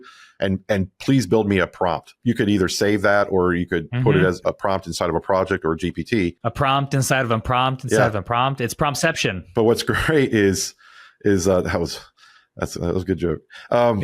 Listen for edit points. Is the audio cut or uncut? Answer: cut